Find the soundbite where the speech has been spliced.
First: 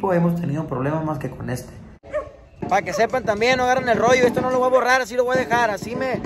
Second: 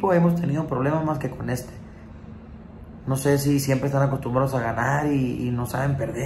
first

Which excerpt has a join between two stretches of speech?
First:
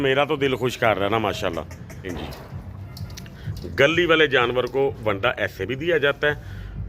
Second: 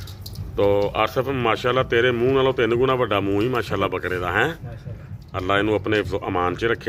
first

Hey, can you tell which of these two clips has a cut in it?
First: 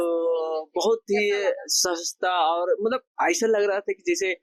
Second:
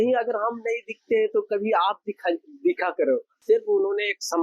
second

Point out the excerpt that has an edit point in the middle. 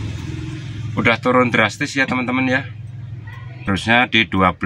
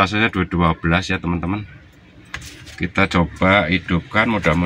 first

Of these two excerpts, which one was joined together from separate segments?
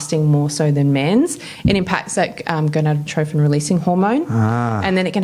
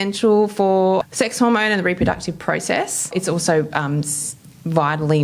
second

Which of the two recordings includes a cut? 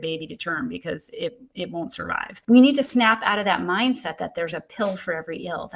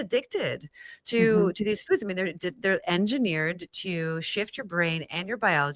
first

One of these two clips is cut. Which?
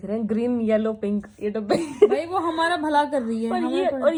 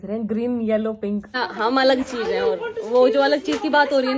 second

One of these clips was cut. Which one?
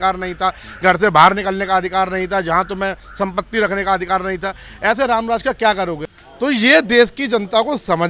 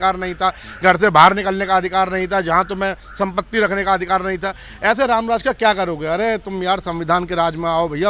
first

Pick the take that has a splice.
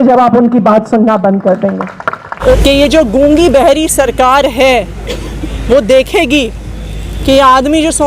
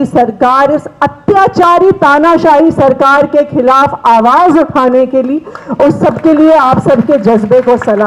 first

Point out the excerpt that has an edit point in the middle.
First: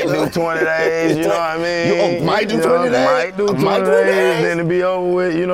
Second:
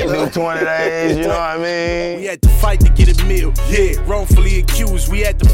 second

